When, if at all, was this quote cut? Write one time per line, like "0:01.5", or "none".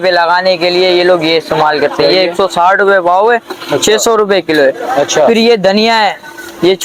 none